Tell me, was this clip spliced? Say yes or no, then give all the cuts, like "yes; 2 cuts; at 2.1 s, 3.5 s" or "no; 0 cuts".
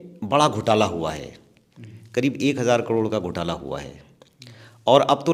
no; 0 cuts